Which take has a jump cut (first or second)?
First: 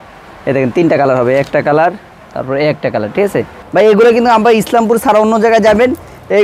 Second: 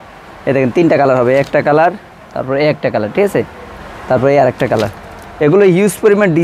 first